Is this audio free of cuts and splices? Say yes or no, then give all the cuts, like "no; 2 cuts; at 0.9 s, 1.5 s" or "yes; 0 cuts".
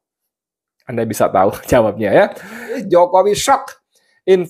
no; 1 cut; at 2.8 s